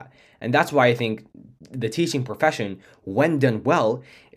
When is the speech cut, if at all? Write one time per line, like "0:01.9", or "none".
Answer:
none